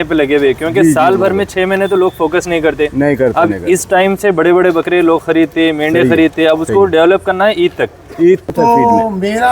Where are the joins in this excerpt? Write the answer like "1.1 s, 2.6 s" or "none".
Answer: 8.5 s